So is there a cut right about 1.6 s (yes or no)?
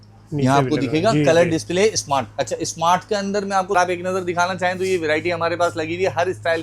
no